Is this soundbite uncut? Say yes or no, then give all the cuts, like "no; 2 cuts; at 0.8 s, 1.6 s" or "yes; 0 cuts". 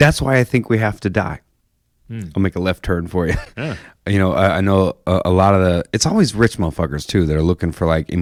yes; 0 cuts